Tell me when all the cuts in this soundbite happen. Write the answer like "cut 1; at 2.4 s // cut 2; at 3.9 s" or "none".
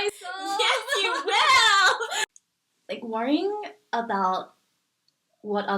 cut 1; at 2.2 s